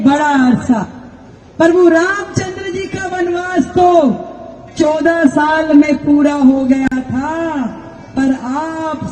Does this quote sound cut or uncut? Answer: uncut